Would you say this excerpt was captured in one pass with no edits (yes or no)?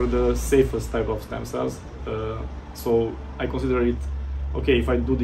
yes